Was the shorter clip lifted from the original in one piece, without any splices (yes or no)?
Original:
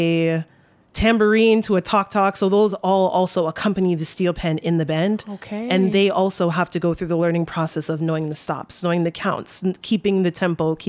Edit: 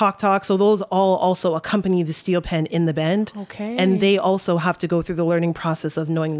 yes